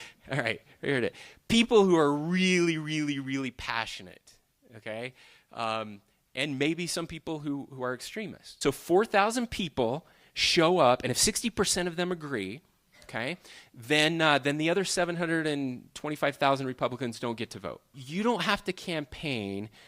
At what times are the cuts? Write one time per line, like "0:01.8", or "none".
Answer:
0:08.4
0:18.0

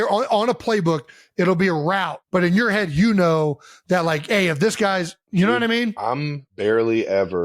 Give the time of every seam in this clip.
0:02.1
0:05.2
0:06.4

